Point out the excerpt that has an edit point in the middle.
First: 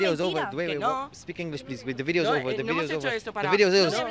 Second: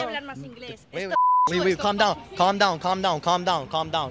second; 1 cut; at 1.2 s

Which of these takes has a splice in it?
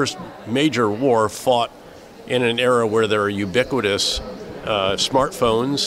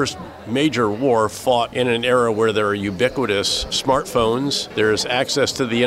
second; 3 cuts; at 1.7 s, 3.8 s, 4.6 s

